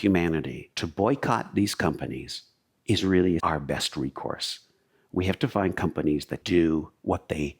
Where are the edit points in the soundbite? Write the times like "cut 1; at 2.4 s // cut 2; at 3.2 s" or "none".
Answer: cut 1; at 3.4 s // cut 2; at 6.4 s